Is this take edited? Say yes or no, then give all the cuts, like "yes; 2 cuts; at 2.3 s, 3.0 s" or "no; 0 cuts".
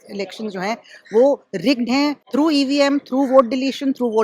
yes; 1 cut; at 2.2 s